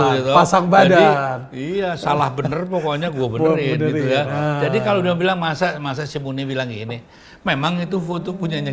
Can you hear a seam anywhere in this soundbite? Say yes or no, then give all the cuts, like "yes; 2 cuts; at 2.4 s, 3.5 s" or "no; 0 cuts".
no; 0 cuts